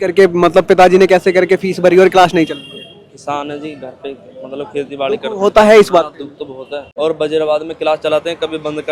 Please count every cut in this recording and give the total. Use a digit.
1